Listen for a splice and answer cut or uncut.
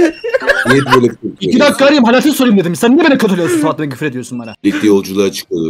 cut